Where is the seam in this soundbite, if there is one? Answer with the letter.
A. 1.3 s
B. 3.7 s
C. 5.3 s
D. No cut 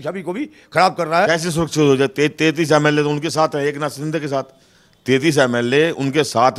A